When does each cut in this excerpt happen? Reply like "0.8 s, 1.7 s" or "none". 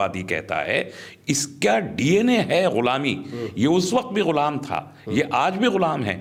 none

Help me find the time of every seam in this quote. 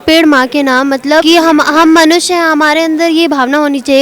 1.2 s

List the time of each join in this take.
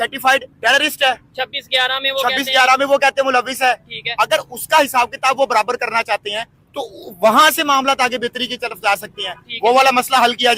none

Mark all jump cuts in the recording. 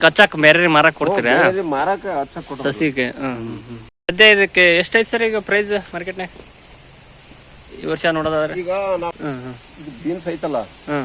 4.1 s, 9.1 s

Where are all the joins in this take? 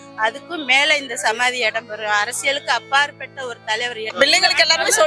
4.0 s

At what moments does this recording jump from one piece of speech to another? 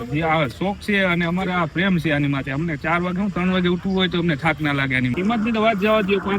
5.1 s

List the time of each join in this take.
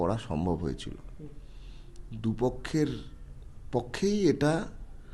none

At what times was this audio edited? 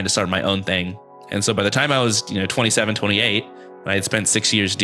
none

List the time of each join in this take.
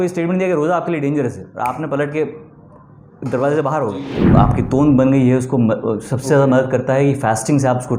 4.3 s

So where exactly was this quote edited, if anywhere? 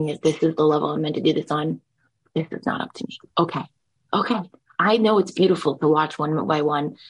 none

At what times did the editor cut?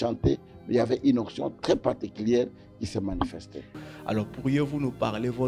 3.8 s

